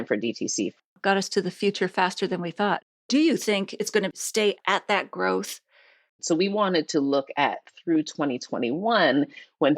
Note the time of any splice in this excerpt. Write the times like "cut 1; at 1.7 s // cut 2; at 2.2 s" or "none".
cut 1; at 0.9 s // cut 2; at 2.9 s // cut 3; at 4.6 s // cut 4; at 6.2 s